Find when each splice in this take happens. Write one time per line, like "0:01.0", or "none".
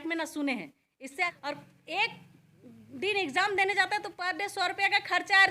0:01.3